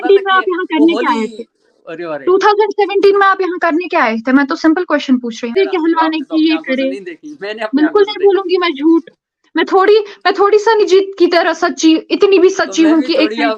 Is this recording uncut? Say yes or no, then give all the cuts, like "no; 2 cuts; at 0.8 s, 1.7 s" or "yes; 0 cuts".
no; 1 cut; at 5.5 s